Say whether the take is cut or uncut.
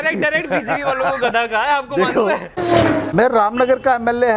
cut